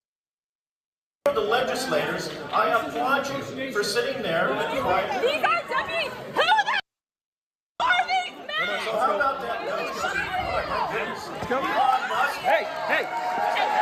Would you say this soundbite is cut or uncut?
uncut